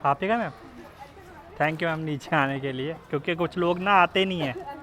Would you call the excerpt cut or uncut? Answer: uncut